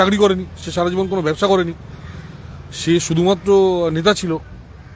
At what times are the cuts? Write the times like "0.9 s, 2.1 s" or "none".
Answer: none